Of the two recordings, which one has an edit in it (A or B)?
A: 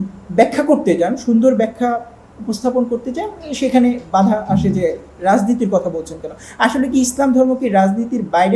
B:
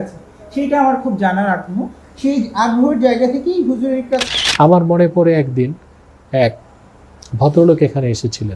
B